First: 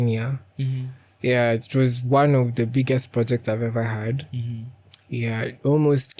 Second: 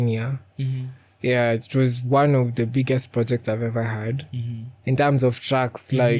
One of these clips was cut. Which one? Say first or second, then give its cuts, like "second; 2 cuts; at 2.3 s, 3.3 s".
second; 1 cut; at 4.7 s